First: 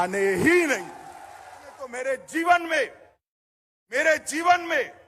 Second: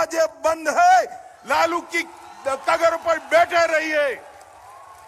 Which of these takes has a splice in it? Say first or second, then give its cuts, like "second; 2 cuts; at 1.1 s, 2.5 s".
first; 1 cut; at 1.9 s